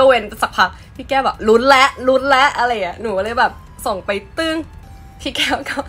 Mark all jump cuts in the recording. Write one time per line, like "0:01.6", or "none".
none